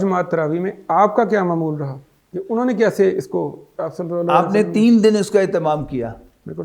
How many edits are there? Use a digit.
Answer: 0